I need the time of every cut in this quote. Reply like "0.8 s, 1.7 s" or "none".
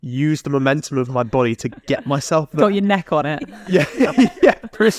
none